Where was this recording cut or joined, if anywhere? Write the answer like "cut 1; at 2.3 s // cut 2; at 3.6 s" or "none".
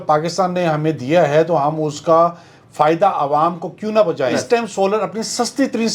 cut 1; at 4.4 s